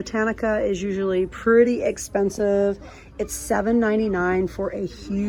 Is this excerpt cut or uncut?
uncut